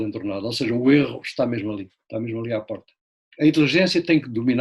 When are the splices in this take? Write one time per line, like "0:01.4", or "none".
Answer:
none